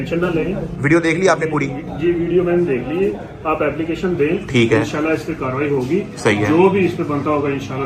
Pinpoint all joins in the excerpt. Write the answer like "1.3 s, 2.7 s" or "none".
none